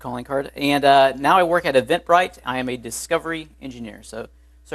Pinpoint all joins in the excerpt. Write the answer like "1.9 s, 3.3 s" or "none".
3.0 s